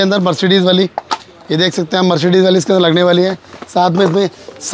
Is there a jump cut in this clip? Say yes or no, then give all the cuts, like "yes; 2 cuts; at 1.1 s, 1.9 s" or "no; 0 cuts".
no; 0 cuts